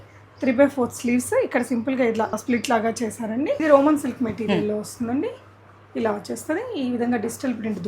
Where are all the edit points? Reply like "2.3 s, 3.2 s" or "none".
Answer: 2.4 s, 3.6 s